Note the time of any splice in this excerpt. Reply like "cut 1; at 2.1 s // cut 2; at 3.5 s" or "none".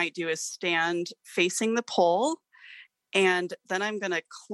none